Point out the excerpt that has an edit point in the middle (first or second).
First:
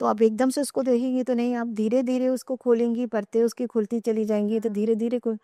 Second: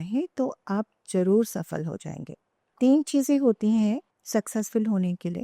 second